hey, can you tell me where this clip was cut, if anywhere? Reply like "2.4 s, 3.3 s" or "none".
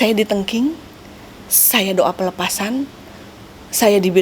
none